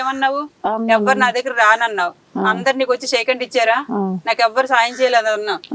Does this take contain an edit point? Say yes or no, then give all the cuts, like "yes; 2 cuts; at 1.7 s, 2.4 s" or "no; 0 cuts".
no; 0 cuts